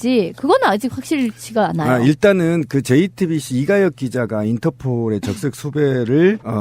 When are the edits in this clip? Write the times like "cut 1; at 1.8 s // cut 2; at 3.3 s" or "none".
none